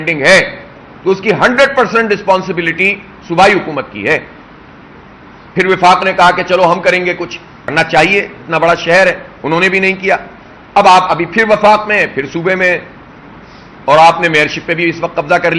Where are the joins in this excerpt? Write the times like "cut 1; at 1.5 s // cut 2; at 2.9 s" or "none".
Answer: cut 1; at 7.7 s